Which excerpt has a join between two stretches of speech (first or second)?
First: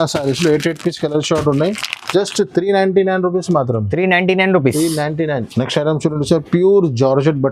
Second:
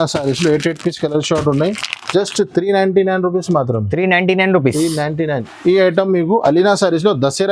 second